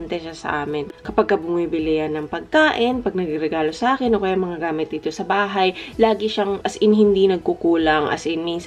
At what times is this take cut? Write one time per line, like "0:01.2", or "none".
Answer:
none

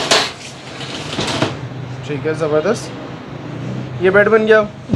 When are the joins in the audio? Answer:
none

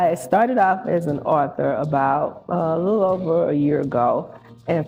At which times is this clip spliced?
none

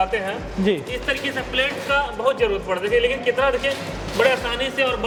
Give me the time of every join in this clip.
none

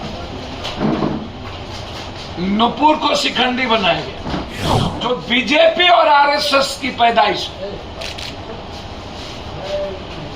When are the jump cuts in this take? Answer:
0:04.8

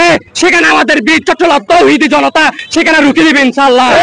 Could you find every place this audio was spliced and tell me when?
none

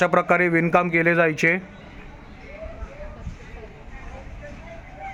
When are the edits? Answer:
none

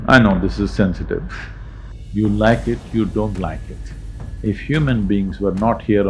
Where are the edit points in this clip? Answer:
0:01.7

